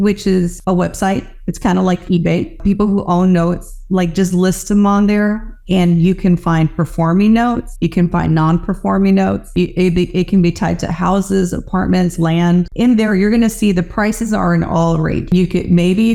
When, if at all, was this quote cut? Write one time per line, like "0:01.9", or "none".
none

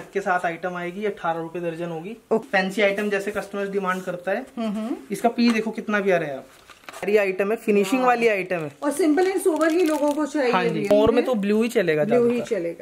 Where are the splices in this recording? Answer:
0:02.4
0:07.0
0:10.9

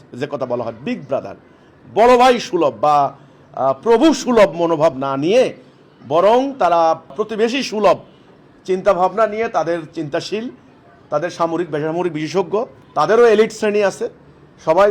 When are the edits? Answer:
0:07.1
0:12.8

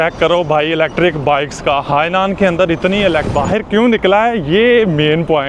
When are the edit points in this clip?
0:03.3

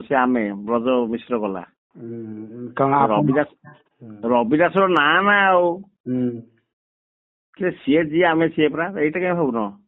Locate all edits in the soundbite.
none

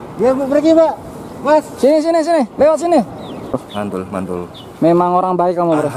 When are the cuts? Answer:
0:03.6

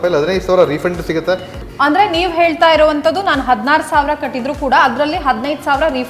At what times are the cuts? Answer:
0:01.5

